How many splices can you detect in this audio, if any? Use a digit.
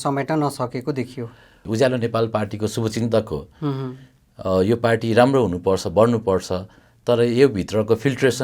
1